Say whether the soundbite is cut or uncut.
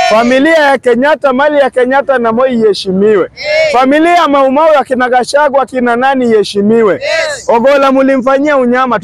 uncut